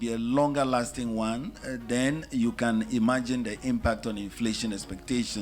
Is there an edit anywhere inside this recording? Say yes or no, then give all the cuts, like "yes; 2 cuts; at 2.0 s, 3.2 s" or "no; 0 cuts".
no; 0 cuts